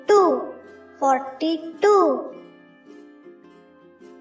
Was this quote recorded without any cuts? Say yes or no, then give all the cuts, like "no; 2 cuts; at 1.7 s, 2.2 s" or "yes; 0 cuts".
no; 1 cut; at 2.8 s